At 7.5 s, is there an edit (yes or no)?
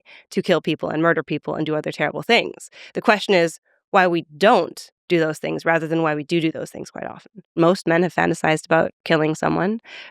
yes